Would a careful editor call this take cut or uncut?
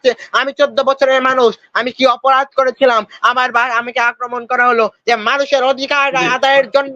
cut